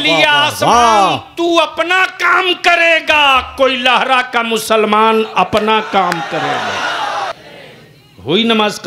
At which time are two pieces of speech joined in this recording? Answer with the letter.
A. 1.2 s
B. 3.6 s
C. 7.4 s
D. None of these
C